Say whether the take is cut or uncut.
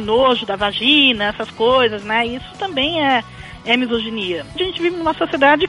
cut